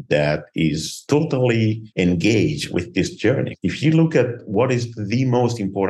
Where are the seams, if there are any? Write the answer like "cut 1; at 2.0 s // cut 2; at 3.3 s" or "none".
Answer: cut 1; at 0.9 s // cut 2; at 1.8 s // cut 3; at 3.1 s